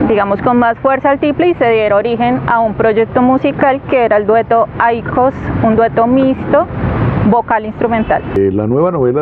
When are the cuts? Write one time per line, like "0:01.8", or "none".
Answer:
0:08.3